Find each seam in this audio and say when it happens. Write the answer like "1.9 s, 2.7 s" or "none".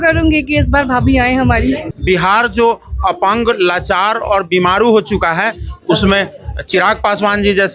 1.9 s